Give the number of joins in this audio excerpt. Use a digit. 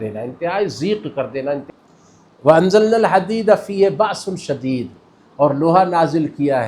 1